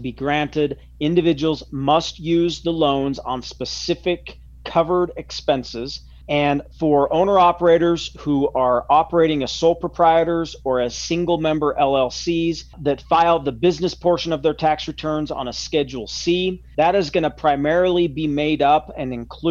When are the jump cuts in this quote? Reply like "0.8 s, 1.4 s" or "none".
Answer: none